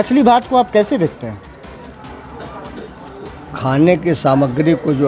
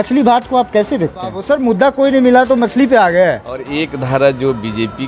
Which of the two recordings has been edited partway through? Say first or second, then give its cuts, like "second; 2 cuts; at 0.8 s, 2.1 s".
second; 2 cuts; at 1.4 s, 3.7 s